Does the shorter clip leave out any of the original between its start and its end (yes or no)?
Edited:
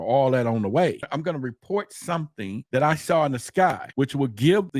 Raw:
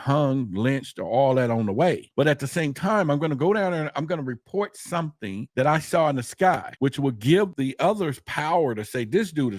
yes